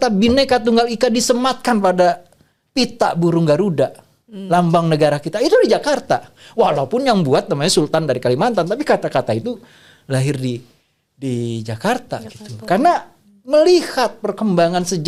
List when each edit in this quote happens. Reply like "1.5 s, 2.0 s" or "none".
none